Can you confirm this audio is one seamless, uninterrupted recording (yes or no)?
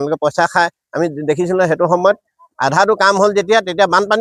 yes